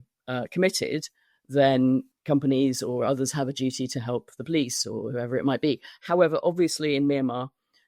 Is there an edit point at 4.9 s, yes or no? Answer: no